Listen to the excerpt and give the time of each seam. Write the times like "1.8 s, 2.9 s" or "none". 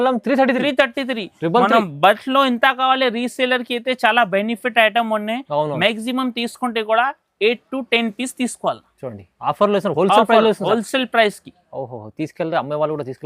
none